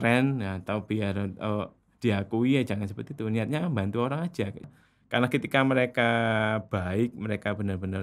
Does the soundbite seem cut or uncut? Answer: cut